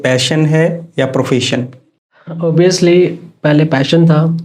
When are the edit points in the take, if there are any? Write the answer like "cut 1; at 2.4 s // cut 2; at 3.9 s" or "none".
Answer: cut 1; at 2.4 s

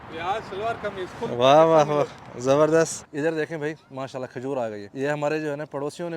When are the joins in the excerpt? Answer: cut 1; at 3.0 s // cut 2; at 4.8 s

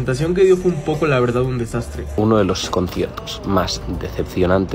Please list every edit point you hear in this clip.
cut 1; at 2.0 s

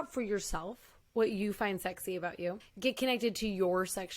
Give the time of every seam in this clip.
cut 1; at 2.7 s

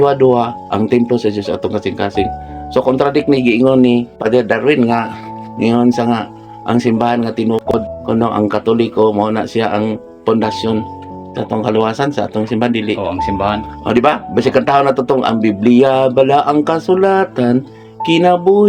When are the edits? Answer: cut 1; at 4.2 s // cut 2; at 7.9 s

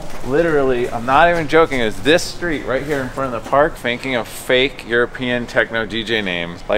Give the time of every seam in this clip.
cut 1; at 3.8 s

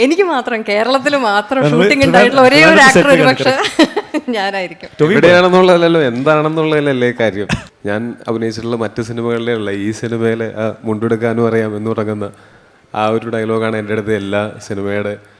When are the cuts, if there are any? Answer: cut 1; at 7.7 s

